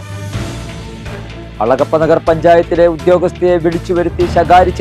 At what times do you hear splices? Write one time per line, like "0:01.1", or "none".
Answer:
none